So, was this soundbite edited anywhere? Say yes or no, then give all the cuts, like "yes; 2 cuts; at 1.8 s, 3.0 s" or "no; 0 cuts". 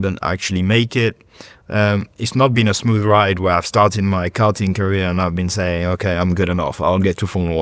no; 0 cuts